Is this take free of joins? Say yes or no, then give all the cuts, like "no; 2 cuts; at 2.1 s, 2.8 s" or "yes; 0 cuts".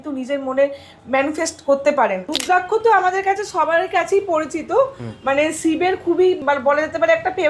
no; 2 cuts; at 2.4 s, 6.4 s